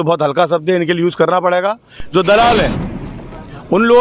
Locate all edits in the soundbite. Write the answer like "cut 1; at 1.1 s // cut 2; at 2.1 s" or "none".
none